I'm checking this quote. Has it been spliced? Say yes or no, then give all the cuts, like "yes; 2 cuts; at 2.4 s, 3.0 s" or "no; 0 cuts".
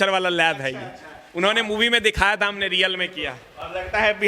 no; 0 cuts